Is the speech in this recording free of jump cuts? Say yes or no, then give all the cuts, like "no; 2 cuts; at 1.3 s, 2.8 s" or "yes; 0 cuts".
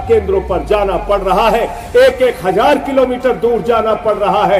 yes; 0 cuts